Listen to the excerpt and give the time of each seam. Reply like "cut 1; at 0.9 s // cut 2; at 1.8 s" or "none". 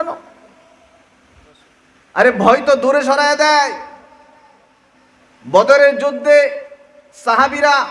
cut 1; at 1.6 s